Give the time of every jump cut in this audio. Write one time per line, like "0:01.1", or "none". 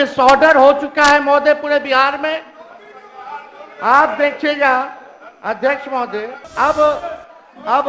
0:06.4